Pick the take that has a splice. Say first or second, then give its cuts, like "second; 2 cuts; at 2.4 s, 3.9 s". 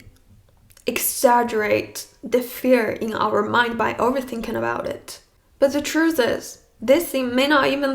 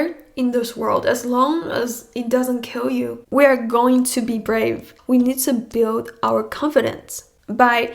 second; 2 cuts; at 3.2 s, 4.9 s